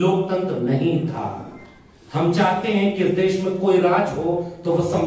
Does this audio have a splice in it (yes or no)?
no